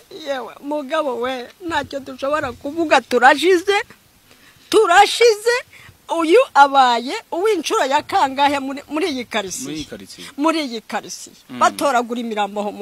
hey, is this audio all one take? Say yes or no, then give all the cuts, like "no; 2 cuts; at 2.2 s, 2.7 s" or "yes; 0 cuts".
yes; 0 cuts